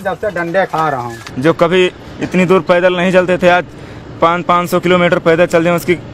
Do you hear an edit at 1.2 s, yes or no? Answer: yes